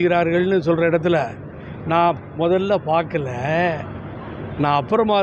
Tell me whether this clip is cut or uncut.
uncut